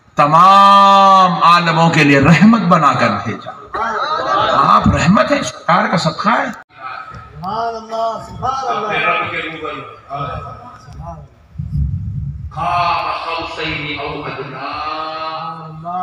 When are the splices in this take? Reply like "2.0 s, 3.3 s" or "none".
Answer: none

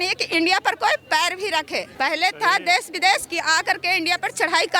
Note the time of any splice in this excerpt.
none

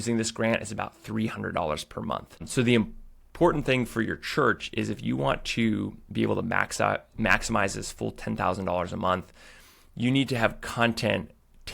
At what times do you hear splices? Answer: 2.4 s

